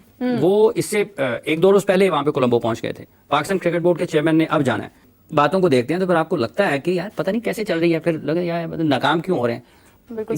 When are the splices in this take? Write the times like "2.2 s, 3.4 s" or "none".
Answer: none